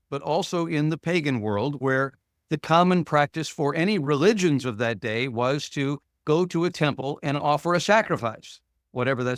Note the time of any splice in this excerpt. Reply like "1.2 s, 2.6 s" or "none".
none